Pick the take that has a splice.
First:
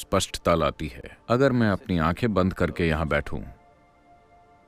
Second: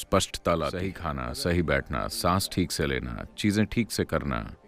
second; 1 cut; at 1.0 s

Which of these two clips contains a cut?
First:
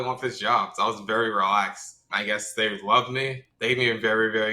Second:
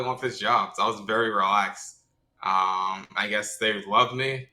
first; 2 cuts; at 2.1 s, 3.5 s

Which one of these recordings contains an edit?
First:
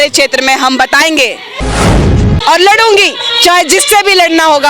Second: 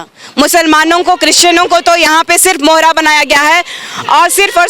first; 1 cut; at 1.9 s

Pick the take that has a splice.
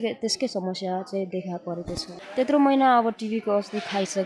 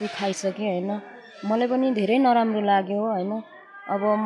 first; 1 cut; at 2.2 s

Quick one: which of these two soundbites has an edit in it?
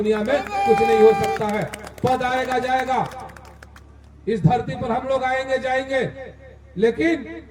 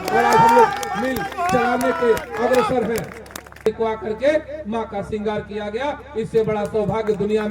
second; 1 cut; at 3.7 s

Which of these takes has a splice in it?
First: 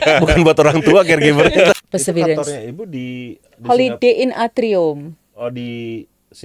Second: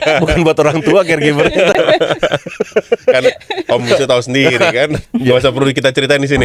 first; 1 cut; at 1.7 s

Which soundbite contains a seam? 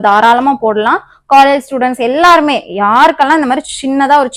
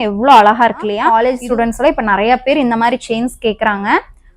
second; 1 cut; at 1.0 s

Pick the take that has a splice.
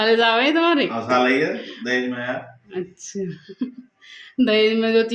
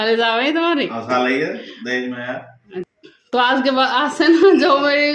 second; 1 cut; at 3.0 s

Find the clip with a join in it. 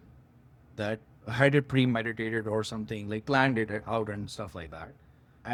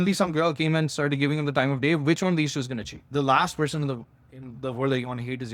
second; 1 cut; at 3.1 s

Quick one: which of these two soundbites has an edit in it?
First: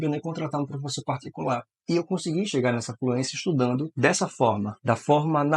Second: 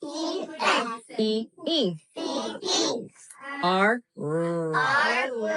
first; 1 cut; at 1.8 s

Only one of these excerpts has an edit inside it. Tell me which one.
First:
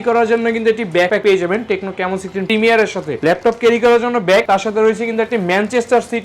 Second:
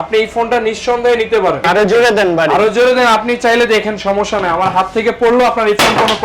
first; 2 cuts; at 1.2 s, 2.4 s

